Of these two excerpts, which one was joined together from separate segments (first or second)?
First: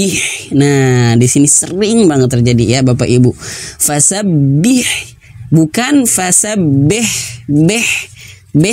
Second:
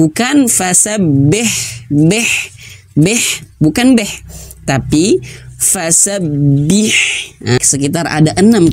second